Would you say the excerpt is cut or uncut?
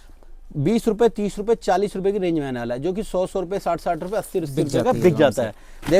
uncut